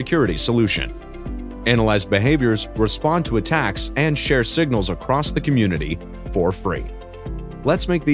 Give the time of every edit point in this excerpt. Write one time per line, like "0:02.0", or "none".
none